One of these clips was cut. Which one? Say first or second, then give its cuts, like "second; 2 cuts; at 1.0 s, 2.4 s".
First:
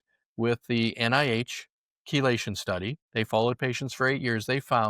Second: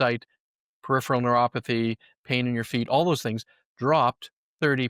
first; 1 cut; at 3.0 s